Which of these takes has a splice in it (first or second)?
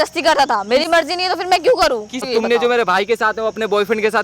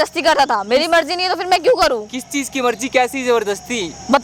first